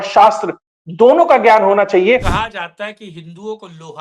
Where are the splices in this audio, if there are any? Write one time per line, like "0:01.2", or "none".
0:02.3